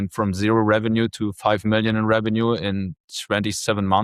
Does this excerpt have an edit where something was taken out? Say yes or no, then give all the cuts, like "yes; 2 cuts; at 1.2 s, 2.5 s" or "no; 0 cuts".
no; 0 cuts